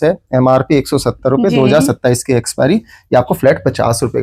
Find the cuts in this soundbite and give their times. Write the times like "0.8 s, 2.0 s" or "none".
none

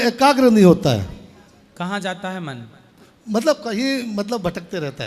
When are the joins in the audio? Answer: none

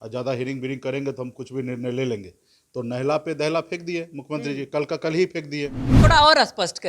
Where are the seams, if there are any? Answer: 5.9 s

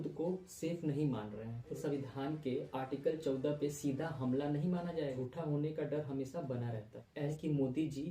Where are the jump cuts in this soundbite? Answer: 1.7 s, 5.2 s, 7.3 s

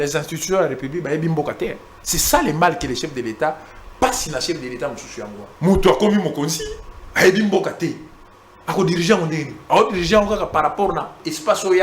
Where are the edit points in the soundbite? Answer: 5.4 s

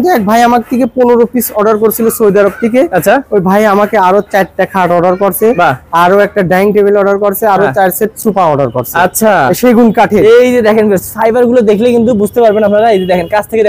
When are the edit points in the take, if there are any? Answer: none

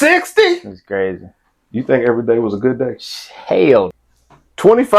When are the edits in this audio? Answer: 3.9 s

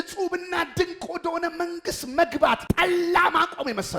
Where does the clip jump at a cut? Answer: 2.6 s

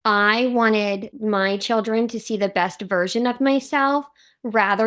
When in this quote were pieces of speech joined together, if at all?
1.1 s

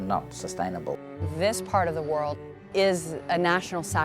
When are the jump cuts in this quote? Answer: 1.1 s, 2.7 s

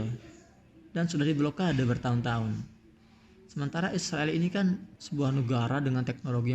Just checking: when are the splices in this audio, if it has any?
5.0 s

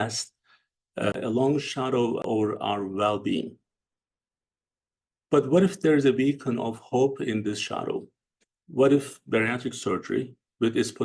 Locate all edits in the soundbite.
1.1 s, 2.2 s

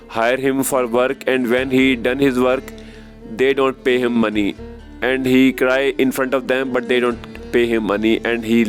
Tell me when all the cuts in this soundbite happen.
none

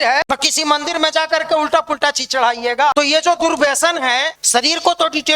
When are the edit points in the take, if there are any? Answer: 2.9 s, 4.4 s

